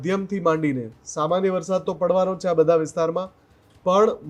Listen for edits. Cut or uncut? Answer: uncut